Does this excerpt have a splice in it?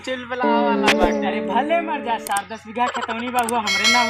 no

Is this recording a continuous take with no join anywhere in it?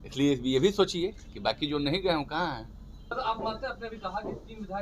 no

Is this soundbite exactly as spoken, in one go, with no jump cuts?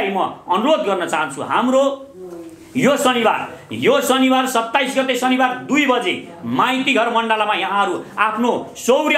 yes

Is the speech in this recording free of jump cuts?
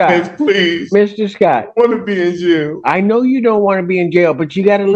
yes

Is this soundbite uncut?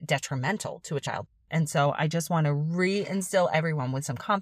no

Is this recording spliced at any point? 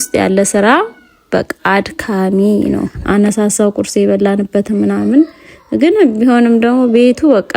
yes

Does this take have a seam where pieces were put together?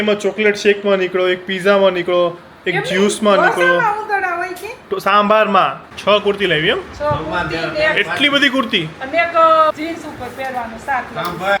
yes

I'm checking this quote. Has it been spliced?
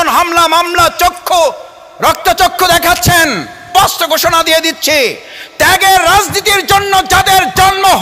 yes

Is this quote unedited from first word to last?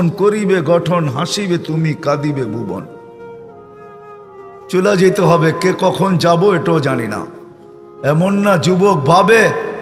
yes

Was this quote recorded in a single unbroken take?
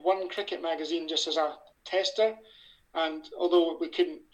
no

